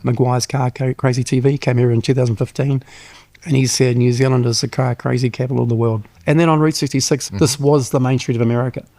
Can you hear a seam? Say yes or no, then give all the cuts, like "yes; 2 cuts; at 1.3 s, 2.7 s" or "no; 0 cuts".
yes; 2 cuts; at 6.1 s, 7.3 s